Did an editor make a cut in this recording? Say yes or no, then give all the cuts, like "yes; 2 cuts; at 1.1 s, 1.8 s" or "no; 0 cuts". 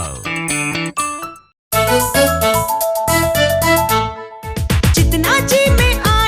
yes; 1 cut; at 1.6 s